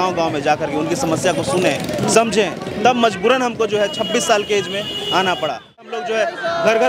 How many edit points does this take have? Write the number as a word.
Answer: one